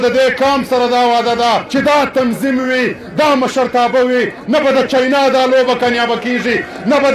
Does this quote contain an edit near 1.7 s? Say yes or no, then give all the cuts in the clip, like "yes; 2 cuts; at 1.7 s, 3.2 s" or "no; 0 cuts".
yes; 1 cut; at 1.7 s